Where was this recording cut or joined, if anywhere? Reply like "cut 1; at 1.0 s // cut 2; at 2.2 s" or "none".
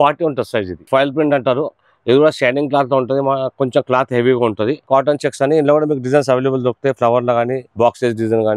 cut 1; at 0.9 s // cut 2; at 4.8 s // cut 3; at 7.6 s